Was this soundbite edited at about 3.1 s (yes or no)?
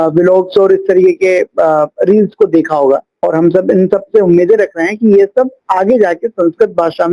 yes